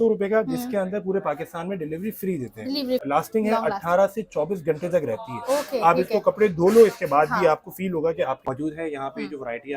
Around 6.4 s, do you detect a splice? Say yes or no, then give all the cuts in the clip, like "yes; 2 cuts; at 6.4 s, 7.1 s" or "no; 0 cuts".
no; 2 cuts; at 3.2 s, 8.6 s